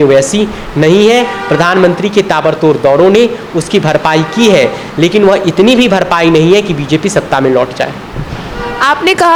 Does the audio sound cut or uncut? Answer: uncut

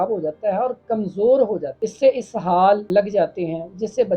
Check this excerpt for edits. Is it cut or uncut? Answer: cut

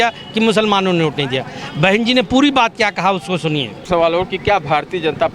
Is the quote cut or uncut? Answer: cut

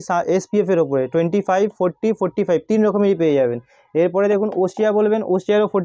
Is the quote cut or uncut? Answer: uncut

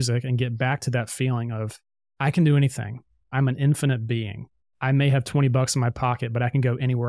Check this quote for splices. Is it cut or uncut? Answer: cut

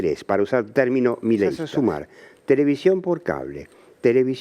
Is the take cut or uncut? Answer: cut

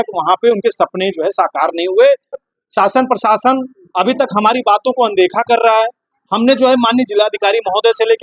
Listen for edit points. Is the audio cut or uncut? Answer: cut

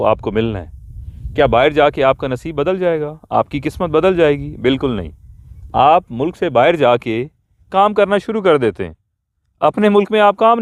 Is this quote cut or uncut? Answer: uncut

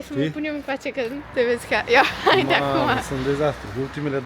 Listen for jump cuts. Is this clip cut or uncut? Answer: uncut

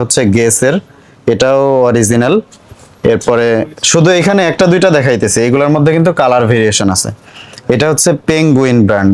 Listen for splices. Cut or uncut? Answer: uncut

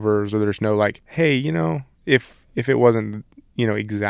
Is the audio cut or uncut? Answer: cut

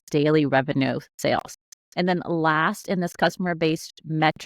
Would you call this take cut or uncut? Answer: uncut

